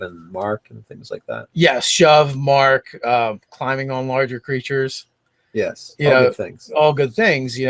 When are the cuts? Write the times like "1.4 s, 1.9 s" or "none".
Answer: 6.5 s